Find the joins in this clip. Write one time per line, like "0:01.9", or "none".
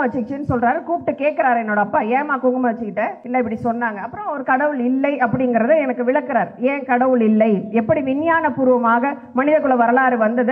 0:03.2